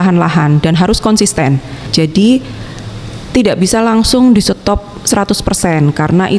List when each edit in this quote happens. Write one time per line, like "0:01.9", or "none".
0:01.8